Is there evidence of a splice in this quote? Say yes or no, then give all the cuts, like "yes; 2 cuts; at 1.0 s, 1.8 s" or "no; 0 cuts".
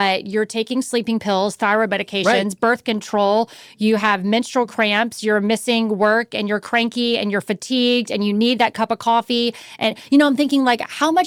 no; 0 cuts